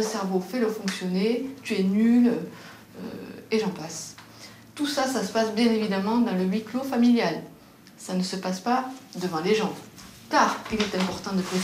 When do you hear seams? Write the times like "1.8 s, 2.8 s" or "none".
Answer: none